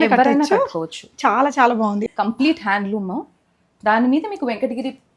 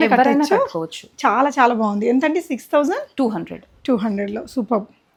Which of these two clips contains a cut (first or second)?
first